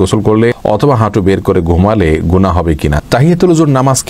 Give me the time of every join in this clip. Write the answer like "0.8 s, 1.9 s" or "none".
3.0 s